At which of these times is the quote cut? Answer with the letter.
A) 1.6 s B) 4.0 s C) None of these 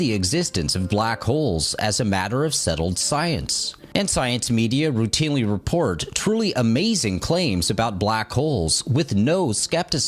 B